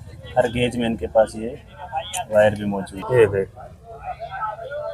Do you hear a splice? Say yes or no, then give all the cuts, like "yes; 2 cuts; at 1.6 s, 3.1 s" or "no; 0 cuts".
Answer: yes; 1 cut; at 3.0 s